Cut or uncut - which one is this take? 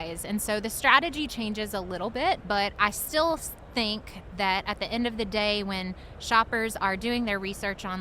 cut